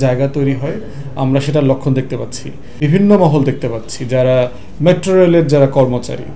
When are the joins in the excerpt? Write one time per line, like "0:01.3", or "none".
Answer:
0:02.7